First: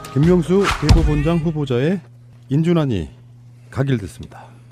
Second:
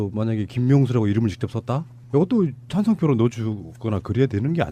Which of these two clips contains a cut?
second; 1 cut; at 1.5 s

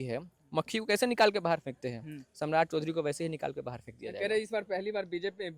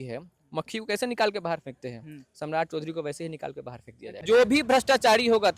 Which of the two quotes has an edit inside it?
second; 1 cut; at 4.2 s

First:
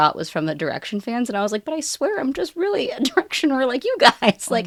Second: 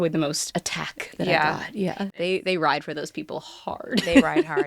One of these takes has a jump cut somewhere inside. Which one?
second; 1 cut; at 2.1 s

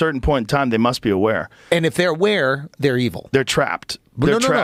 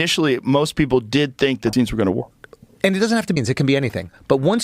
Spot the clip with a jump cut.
second; 2 cuts; at 1.7 s, 3.4 s

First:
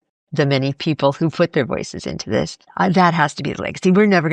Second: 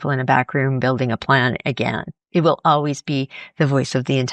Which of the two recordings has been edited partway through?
first; 1 cut; at 2.7 s

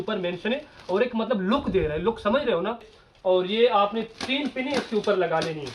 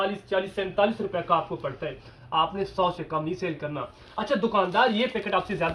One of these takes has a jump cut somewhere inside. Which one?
first; 1 cut; at 2.9 s

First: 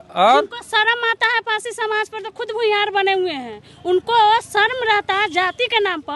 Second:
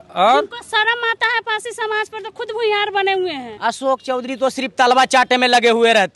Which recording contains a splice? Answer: second; 1 cut; at 3.5 s

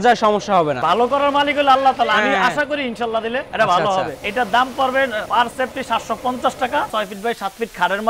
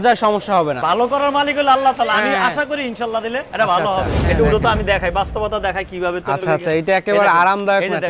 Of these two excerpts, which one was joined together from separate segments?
second; 1 cut; at 4.2 s

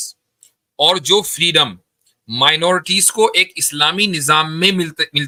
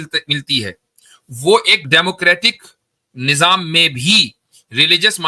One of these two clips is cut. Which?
second; 1 cut; at 1.8 s

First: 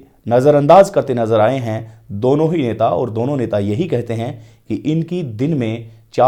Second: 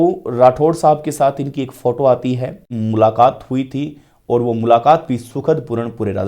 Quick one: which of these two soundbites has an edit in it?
second; 1 cut; at 2.7 s

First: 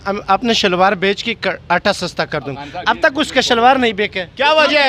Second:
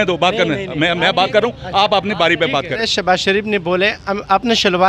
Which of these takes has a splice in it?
second; 1 cut; at 2.8 s

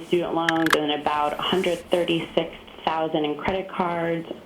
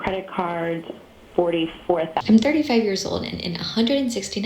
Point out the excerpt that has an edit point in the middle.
second; 1 cut; at 2.2 s

